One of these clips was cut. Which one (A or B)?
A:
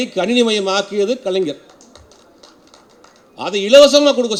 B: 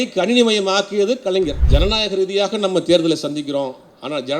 B